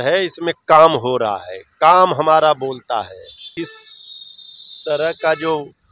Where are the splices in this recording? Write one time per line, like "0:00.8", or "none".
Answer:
0:03.5